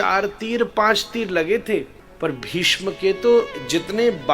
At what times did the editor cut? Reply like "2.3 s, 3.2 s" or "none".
2.0 s